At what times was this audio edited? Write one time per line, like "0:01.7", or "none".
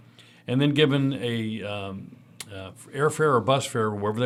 none

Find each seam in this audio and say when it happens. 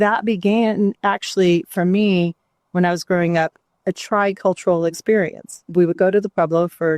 0:05.6

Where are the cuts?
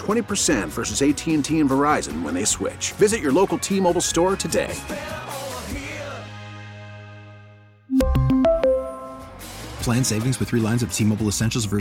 none

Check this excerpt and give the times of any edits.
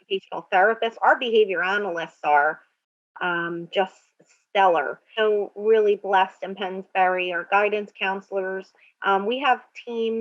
0:05.0

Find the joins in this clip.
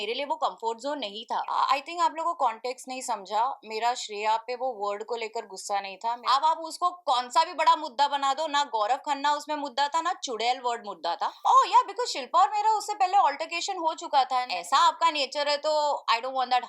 0:01.5
0:06.2
0:11.4
0:14.5

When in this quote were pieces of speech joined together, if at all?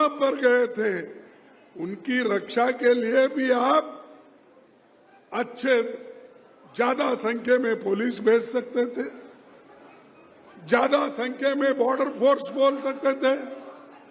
none

